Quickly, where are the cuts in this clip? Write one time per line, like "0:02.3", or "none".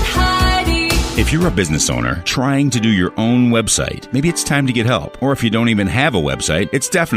0:01.0